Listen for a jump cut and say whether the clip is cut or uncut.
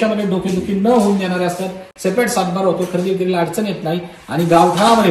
uncut